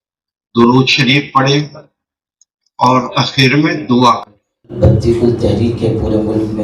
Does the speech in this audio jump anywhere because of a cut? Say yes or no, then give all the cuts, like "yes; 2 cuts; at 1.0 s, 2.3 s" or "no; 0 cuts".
yes; 1 cut; at 4.7 s